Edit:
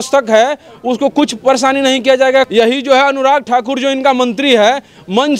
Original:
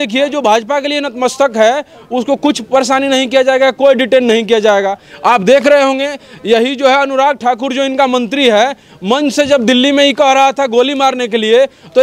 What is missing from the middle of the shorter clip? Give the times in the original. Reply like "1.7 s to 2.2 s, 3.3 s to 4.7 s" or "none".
3.7 s to 6.4 s